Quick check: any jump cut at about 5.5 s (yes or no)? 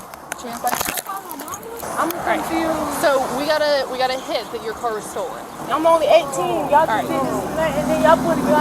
yes